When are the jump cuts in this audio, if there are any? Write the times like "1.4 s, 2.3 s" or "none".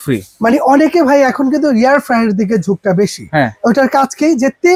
none